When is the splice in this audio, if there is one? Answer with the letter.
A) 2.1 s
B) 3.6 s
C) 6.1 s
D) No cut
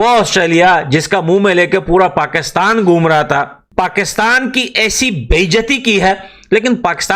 B